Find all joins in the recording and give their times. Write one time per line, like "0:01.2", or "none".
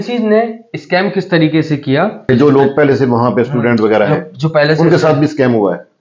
0:02.2